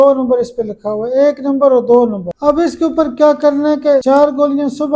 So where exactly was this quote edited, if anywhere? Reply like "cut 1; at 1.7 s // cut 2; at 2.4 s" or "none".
cut 1; at 2.3 s // cut 2; at 4.0 s